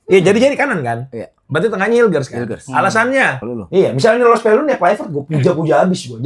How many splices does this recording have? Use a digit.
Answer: 1